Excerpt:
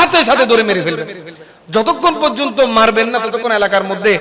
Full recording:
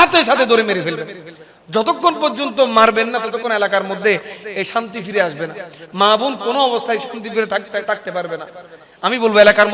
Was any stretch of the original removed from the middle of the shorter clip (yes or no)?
no